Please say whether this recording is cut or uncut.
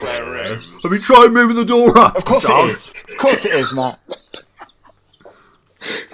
uncut